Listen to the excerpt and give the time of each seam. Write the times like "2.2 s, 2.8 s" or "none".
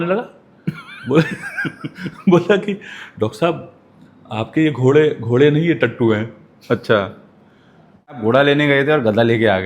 8.2 s